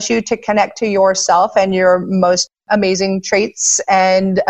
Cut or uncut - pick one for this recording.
cut